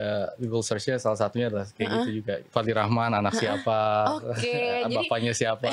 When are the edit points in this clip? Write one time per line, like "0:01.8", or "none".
0:02.4